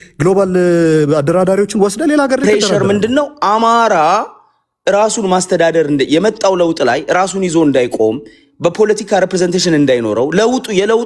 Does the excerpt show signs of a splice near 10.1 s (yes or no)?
no